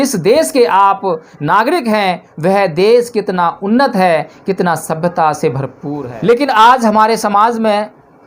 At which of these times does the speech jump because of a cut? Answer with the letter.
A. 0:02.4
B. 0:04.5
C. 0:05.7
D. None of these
C